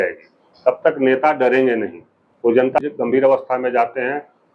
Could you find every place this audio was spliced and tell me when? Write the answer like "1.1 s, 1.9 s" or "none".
2.8 s